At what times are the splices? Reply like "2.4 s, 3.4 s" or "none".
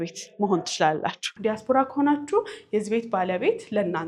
1.2 s